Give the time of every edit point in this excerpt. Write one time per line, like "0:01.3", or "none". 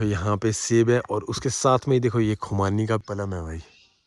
0:03.0